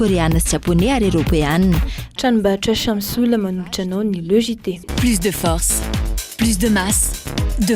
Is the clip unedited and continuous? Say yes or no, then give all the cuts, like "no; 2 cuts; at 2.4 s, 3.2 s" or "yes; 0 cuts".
no; 1 cut; at 4.8 s